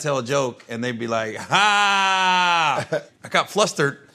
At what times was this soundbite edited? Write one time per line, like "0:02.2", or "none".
0:03.1